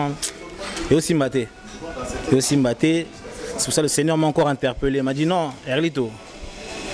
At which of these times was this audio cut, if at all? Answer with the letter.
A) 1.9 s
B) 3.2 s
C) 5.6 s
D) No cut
D